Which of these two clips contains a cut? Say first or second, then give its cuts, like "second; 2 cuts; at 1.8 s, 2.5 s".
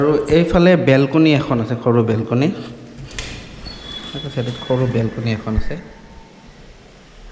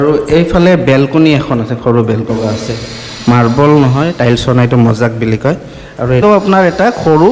second; 2 cuts; at 2.3 s, 6.2 s